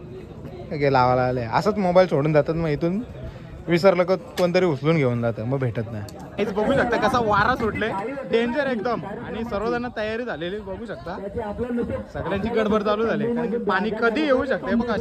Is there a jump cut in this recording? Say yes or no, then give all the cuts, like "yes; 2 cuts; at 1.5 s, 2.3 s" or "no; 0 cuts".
yes; 1 cut; at 6.2 s